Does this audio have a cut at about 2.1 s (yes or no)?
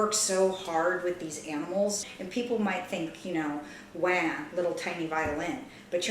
yes